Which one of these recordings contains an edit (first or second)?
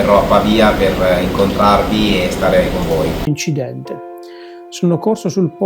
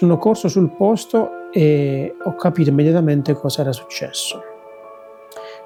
first